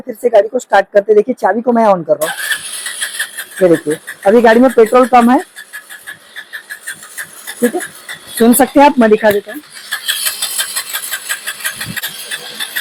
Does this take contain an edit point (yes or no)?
no